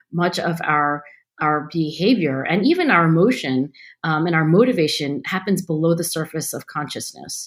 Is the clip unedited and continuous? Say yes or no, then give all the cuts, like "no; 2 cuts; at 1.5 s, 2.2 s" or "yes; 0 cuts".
yes; 0 cuts